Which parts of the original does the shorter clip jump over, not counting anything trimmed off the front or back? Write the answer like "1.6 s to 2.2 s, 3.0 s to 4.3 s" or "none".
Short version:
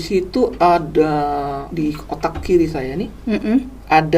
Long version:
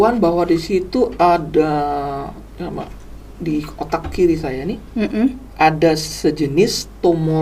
2.2 s to 3.3 s